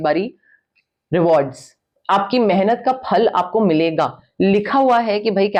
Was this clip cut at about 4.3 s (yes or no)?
no